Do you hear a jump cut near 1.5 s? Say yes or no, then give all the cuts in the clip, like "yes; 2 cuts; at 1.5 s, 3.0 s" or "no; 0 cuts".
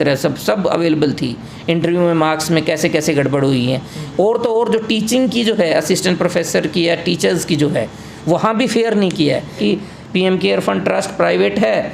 yes; 2 cuts; at 1.5 s, 9.6 s